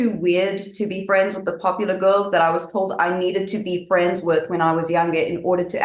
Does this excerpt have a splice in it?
no; 0 cuts

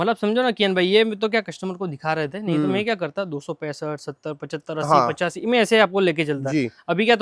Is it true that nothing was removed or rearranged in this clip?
yes; 0 cuts

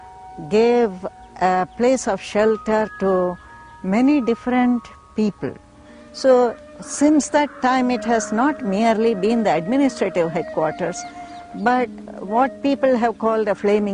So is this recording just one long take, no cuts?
no; 1 cut; at 10.5 s

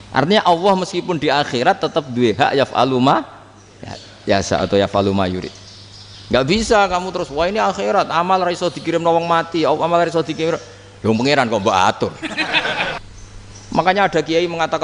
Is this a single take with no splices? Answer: no; 1 cut; at 13.0 s

